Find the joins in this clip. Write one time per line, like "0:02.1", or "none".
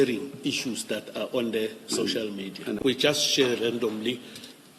0:02.8